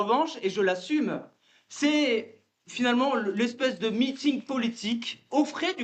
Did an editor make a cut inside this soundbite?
no; 0 cuts

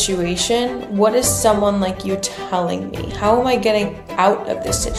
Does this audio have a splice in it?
no; 0 cuts

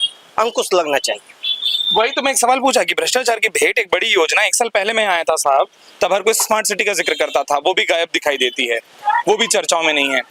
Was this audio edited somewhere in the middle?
no; 0 cuts

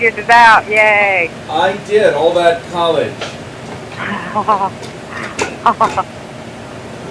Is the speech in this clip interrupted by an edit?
no; 0 cuts

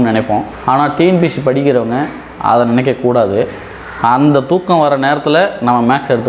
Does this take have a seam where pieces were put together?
no; 0 cuts

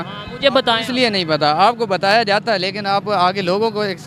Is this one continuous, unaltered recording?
yes; 0 cuts

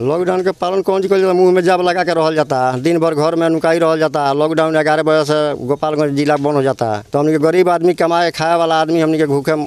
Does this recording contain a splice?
no; 0 cuts

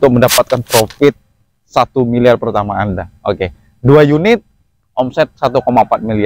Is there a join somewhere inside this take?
no; 0 cuts

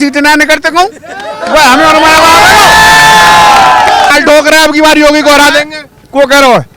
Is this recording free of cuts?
no; 1 cut; at 4.1 s

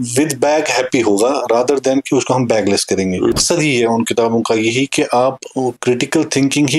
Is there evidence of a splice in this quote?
yes; 1 cut; at 3.3 s

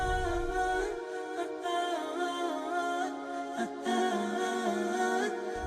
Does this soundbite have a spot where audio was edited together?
no; 0 cuts

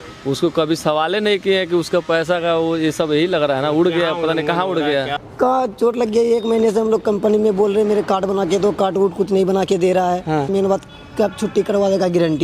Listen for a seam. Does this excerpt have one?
yes; 2 cuts; at 5.2 s, 10.5 s

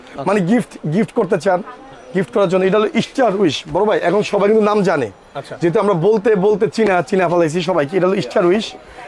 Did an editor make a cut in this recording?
no; 0 cuts

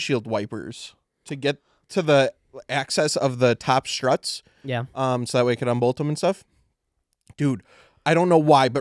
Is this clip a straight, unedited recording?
yes; 0 cuts

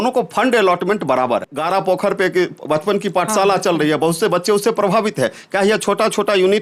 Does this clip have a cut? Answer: yes; 1 cut; at 1.5 s

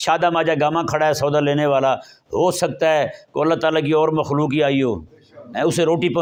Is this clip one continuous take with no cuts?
yes; 0 cuts

